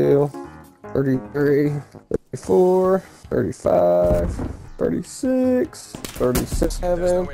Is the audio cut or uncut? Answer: uncut